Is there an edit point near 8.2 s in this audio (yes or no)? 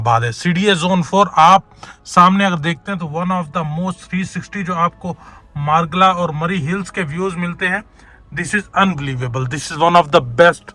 no